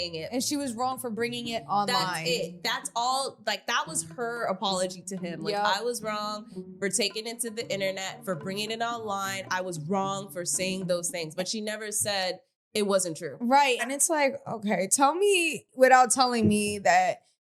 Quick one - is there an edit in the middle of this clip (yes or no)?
yes